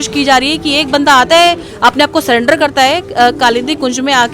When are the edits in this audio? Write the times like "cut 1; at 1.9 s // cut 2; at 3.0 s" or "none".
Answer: none